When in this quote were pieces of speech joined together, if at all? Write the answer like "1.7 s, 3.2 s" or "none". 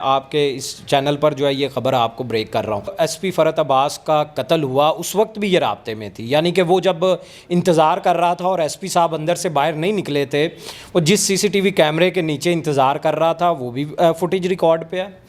2.9 s